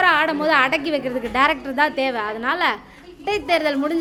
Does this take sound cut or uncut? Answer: uncut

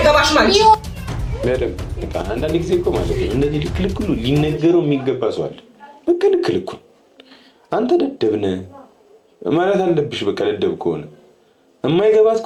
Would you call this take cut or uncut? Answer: uncut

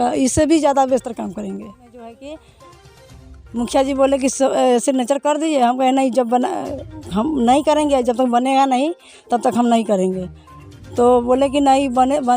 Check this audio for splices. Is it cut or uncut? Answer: cut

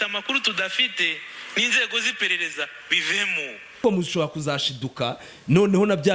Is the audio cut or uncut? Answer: cut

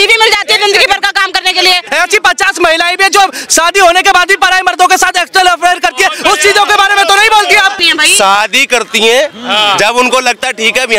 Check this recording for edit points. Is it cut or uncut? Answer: cut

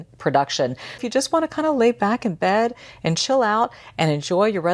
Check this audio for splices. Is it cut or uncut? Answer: cut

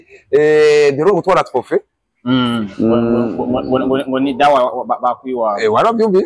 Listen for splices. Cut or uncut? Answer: uncut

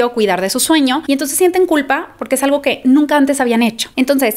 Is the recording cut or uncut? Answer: uncut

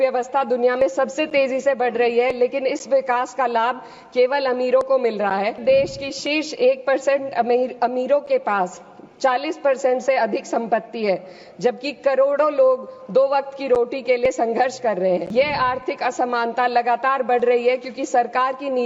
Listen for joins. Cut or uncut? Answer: cut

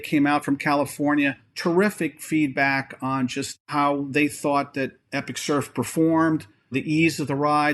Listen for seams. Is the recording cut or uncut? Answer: uncut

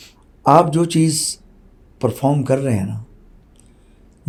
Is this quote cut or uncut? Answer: uncut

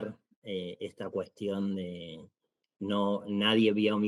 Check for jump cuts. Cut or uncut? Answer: uncut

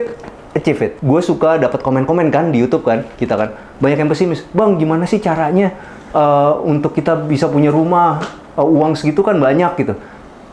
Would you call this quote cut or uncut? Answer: cut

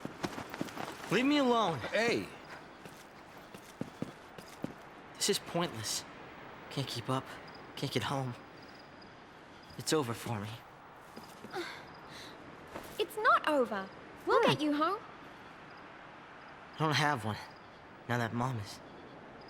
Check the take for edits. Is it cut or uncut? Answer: uncut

